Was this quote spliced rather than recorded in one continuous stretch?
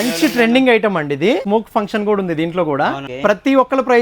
yes; 2 cuts; at 1.4 s, 3.1 s

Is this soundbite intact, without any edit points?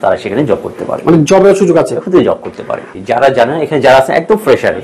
no; 1 cut; at 2.9 s

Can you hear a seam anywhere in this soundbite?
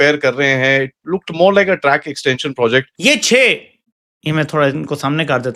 yes; 1 cut; at 2.9 s

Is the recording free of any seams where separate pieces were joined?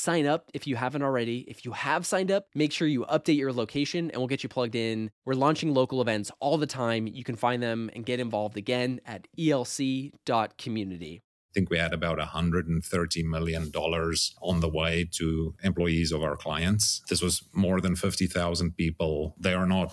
no; 2 cuts; at 11.4 s, 17.0 s

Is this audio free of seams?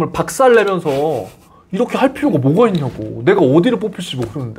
yes; 0 cuts

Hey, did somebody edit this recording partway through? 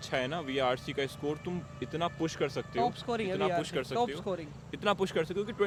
no; 0 cuts

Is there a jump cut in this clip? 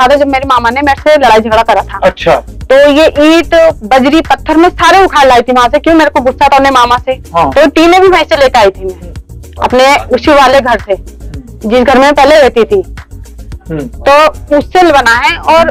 no; 0 cuts

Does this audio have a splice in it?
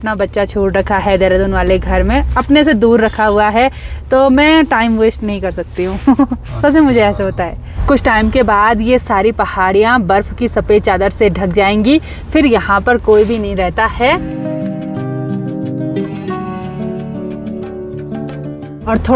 no; 0 cuts

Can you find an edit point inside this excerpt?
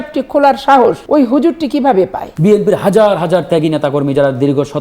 yes; 2 cuts; at 1.0 s, 2.2 s

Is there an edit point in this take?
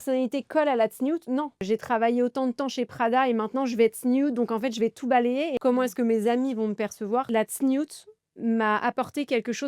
yes; 3 cuts; at 1.6 s, 5.5 s, 7.3 s

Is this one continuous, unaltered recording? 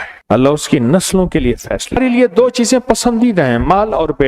no; 1 cut; at 2.0 s

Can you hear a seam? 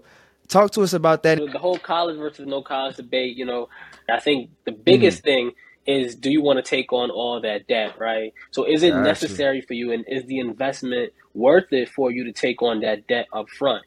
yes; 2 cuts; at 1.4 s, 4.1 s

